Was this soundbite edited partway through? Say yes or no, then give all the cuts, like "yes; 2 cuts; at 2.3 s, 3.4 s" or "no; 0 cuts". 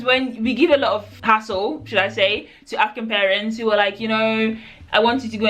yes; 1 cut; at 1.1 s